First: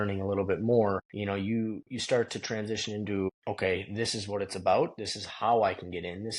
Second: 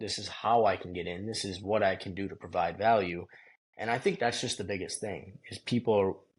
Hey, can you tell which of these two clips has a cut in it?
first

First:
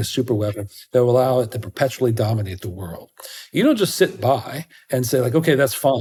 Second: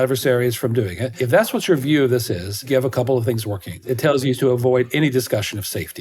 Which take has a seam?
second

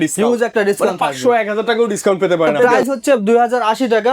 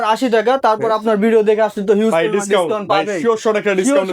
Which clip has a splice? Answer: first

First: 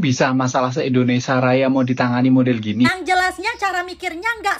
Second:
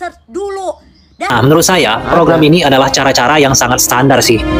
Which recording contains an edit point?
second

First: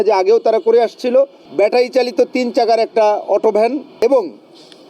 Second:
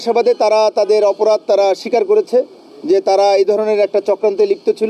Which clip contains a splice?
first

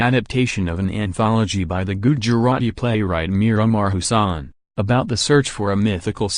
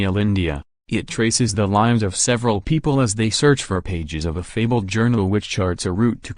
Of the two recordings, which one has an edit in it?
first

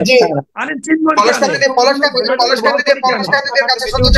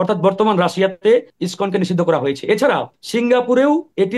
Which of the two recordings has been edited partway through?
second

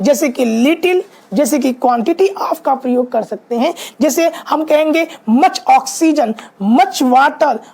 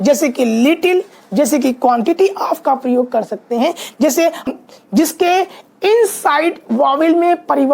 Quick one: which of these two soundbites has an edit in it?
second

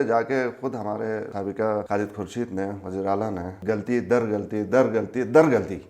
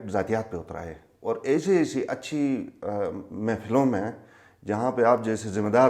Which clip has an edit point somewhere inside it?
first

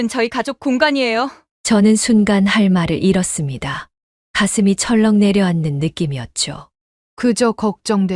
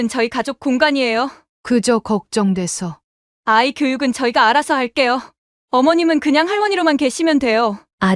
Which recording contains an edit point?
second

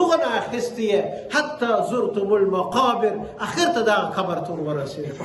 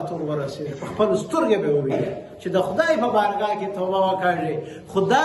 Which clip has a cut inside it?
second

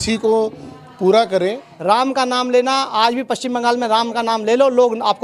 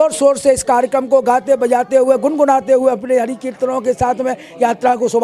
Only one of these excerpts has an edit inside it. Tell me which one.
first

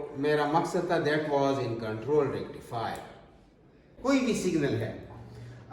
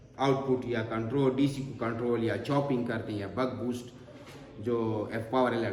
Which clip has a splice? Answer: first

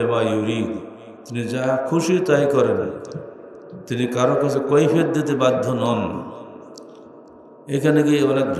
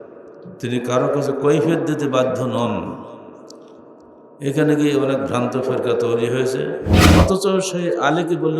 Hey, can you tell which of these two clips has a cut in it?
second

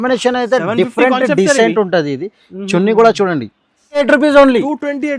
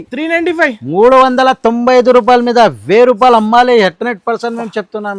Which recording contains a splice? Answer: first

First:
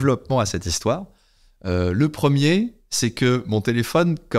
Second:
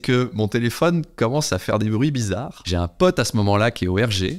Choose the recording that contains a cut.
second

